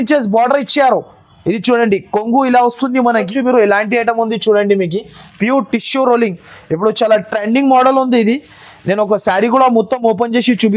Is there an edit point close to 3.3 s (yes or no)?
yes